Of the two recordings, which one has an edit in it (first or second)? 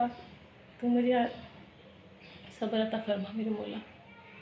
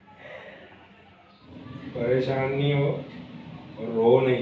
second